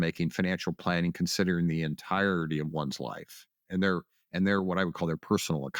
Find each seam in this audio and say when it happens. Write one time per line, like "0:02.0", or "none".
none